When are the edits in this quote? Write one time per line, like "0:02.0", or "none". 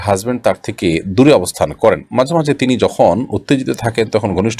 none